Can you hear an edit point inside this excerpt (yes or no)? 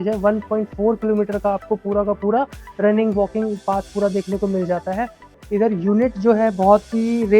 yes